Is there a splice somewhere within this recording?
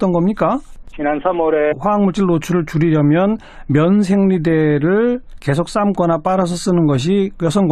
no; 0 cuts

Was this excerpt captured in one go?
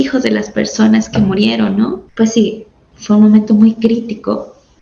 no; 1 cut; at 2.0 s

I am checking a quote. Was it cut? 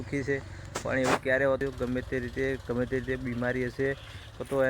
yes; 1 cut; at 1.6 s

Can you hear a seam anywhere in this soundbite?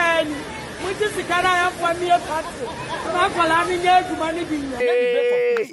yes; 1 cut; at 4.7 s

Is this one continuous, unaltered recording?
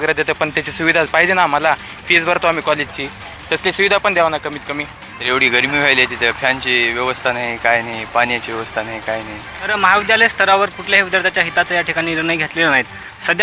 no; 2 cuts; at 5.1 s, 9.7 s

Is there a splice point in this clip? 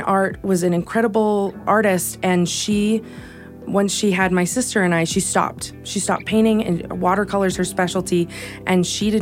yes; 2 cuts; at 1.6 s, 3.7 s

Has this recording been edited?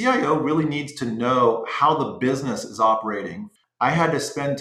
yes; 1 cut; at 3.4 s

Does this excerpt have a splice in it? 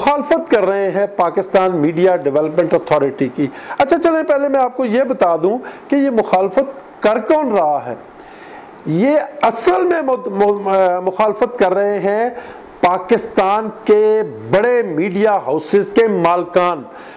no; 0 cuts

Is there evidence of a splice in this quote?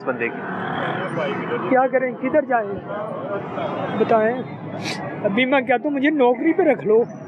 no; 0 cuts

